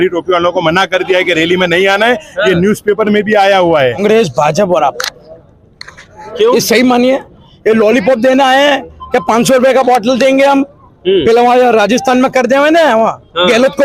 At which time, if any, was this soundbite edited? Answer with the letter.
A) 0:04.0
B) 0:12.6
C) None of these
A